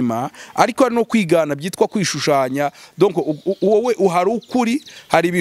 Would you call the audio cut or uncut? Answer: uncut